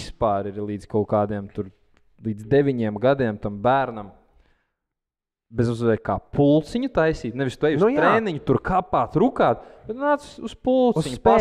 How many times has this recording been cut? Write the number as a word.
zero